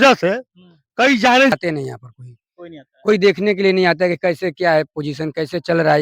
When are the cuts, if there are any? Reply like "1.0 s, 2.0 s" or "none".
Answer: 1.5 s